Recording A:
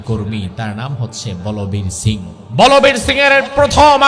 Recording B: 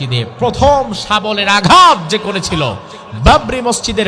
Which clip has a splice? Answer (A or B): A